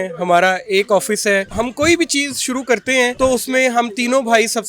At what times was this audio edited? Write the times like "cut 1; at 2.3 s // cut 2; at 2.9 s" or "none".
cut 1; at 1.5 s // cut 2; at 3.1 s